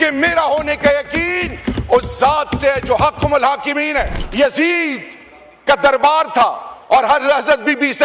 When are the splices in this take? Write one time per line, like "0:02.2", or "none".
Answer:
0:04.2